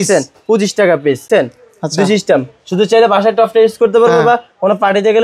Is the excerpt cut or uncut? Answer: cut